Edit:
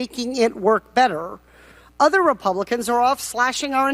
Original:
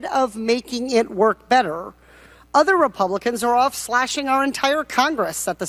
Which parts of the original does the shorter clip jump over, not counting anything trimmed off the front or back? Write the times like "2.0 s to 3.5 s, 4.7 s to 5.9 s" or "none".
none